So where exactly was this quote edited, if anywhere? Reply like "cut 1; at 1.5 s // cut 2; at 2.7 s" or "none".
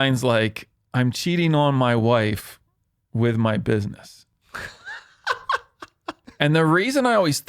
cut 1; at 6.3 s